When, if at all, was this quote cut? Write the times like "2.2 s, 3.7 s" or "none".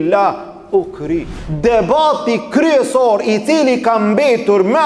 1.4 s